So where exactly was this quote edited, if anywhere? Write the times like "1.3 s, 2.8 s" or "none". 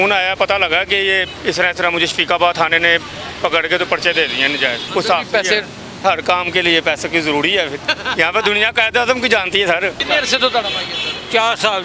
1.3 s, 4.8 s, 6.0 s, 7.9 s, 10.0 s